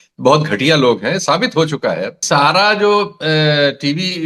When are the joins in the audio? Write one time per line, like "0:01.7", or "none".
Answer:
0:02.2